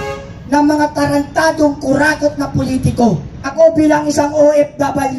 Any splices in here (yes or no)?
yes